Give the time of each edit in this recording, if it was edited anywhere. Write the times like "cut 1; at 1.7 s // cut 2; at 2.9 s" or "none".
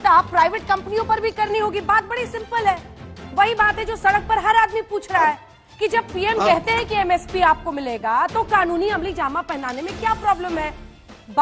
none